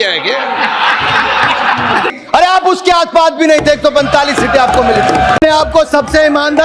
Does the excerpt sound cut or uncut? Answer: cut